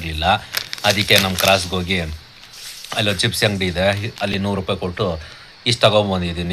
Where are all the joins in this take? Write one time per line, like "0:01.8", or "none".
none